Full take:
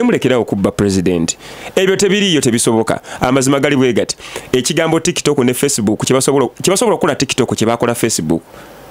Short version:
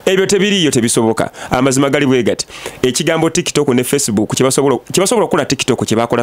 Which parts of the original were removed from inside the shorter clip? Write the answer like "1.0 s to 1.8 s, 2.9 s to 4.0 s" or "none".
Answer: none